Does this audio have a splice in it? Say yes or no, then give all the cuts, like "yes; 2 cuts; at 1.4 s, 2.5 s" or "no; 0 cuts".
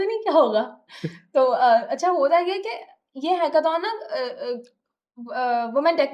no; 0 cuts